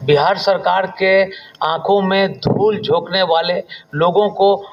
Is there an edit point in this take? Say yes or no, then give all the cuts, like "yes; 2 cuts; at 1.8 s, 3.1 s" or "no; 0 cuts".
no; 0 cuts